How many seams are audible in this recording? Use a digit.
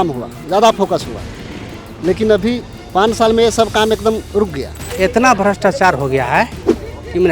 1